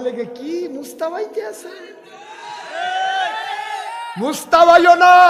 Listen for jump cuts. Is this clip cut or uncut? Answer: uncut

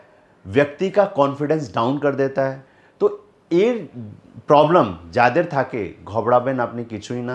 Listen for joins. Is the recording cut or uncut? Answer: cut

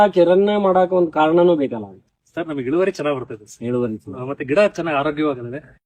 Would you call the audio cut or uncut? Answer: uncut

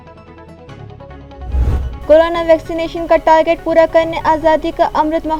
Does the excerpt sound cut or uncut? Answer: uncut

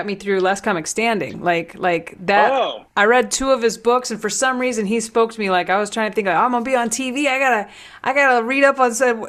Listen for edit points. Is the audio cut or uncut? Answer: uncut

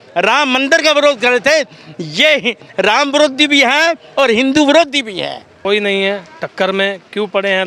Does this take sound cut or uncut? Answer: cut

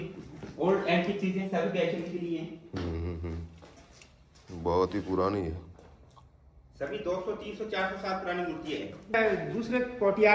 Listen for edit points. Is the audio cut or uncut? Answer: cut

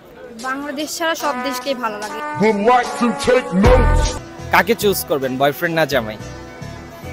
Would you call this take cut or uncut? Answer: cut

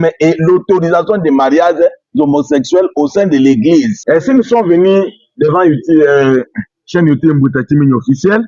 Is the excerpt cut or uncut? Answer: cut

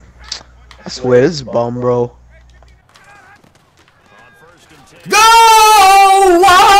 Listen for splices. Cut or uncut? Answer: cut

